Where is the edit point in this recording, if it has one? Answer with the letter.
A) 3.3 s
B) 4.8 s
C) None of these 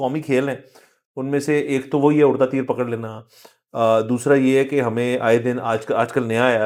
C